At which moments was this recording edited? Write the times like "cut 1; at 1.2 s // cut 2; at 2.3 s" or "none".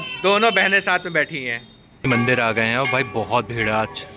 cut 1; at 2.1 s